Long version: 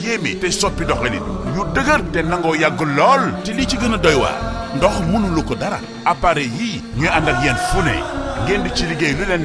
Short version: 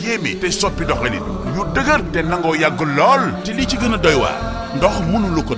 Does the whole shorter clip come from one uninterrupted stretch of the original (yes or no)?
yes